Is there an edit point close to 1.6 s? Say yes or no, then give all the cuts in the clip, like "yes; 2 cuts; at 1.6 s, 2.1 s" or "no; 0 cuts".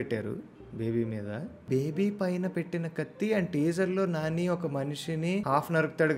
yes; 2 cuts; at 1.6 s, 5.4 s